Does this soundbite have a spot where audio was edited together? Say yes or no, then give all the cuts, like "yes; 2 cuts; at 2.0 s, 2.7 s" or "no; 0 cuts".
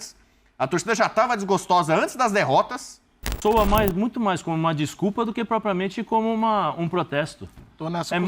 yes; 1 cut; at 3.3 s